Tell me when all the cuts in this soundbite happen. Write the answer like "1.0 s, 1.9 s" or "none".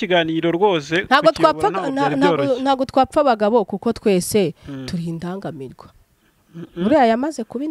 none